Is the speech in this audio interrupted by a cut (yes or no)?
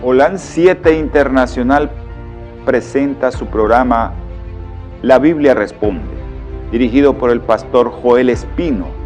yes